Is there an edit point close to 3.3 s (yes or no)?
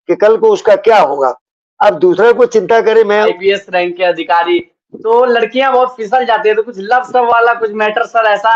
yes